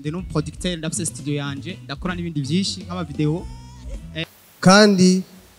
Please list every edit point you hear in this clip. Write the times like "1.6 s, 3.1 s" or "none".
4.2 s